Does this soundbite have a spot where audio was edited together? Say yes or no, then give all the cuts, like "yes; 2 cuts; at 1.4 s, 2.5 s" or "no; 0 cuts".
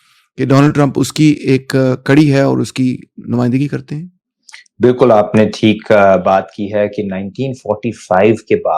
no; 0 cuts